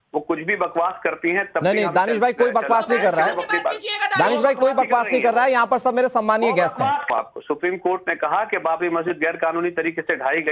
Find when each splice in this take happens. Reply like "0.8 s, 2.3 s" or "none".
7.1 s